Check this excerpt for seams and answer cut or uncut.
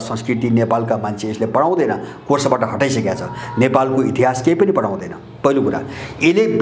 uncut